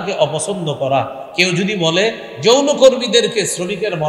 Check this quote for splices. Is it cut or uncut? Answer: uncut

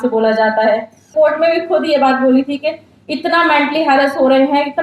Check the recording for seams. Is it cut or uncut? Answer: cut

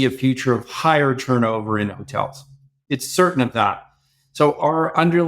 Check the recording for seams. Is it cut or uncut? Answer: uncut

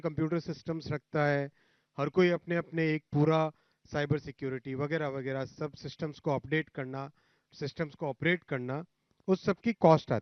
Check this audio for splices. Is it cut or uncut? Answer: uncut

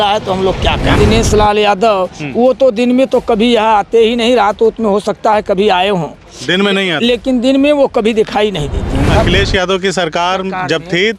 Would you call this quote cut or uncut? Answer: cut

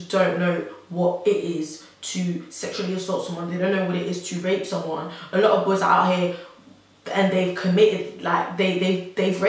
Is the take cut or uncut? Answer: uncut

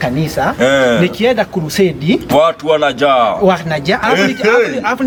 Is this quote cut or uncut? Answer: uncut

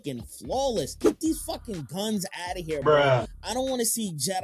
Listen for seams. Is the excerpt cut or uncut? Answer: cut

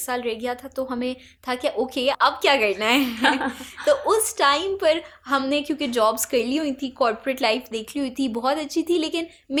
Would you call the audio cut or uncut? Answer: uncut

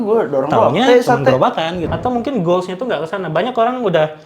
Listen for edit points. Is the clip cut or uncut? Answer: cut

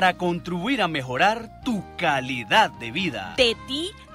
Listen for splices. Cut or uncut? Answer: uncut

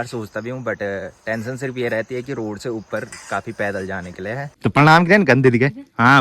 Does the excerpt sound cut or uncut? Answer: cut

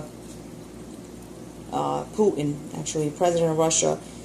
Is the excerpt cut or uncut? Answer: cut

